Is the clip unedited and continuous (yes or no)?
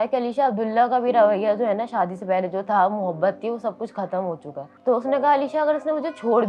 yes